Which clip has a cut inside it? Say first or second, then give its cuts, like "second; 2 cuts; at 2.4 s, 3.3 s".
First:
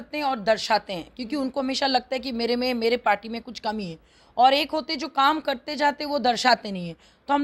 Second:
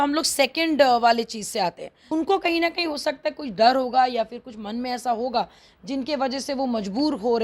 second; 1 cut; at 1.9 s